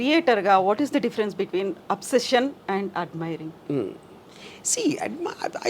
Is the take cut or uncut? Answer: uncut